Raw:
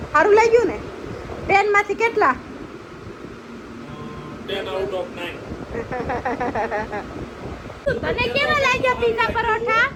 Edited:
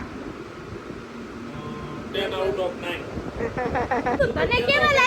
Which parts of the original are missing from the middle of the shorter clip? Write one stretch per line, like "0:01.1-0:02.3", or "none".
0:06.5-0:07.8